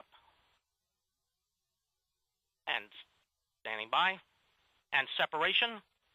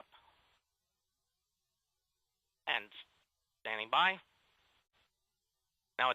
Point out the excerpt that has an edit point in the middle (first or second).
first